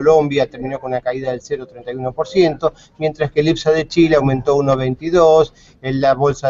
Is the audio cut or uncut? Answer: cut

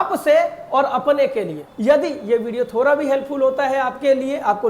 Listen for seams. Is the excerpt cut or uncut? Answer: cut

